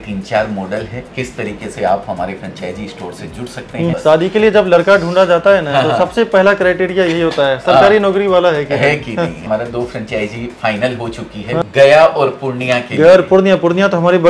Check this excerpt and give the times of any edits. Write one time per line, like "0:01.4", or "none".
0:01.1
0:03.9
0:09.5
0:11.6

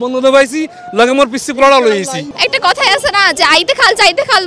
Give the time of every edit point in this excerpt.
0:02.2

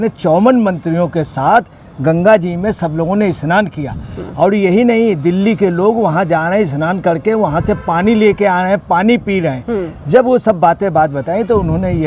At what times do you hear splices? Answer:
none

